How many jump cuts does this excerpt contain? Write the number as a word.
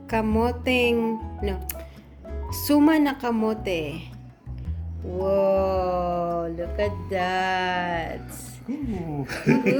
zero